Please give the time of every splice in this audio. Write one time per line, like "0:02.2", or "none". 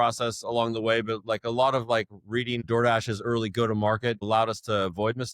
0:02.6
0:04.2